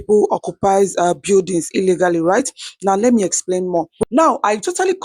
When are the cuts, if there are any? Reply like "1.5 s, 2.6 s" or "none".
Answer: 3.9 s